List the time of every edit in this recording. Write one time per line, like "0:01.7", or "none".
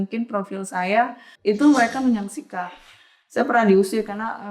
0:01.2

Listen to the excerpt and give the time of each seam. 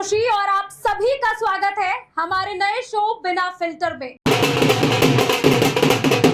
0:04.2

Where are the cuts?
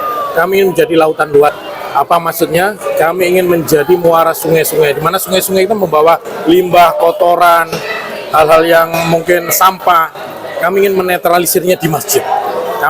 0:01.7

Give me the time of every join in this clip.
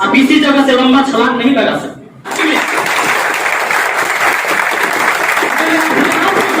0:02.3

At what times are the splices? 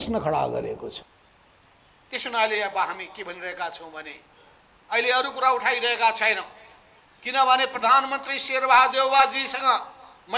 none

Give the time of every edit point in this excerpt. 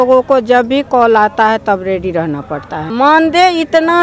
0:02.9

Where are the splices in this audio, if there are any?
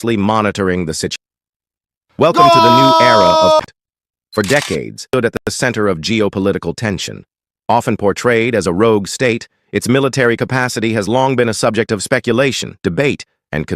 0:01.1
0:03.7
0:05.3

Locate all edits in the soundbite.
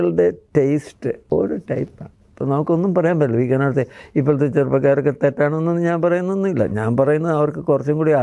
0:01.2

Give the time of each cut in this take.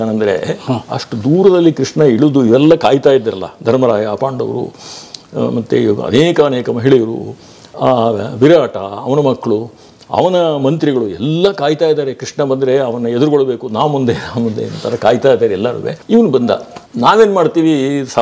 none

